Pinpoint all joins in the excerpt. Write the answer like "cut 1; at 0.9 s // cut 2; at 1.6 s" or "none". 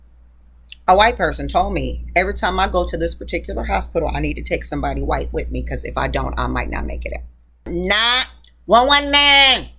cut 1; at 7.7 s